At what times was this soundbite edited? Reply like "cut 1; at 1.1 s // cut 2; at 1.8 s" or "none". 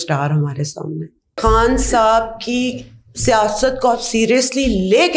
cut 1; at 1.4 s